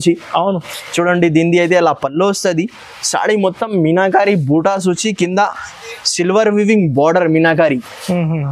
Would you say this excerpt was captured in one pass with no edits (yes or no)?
yes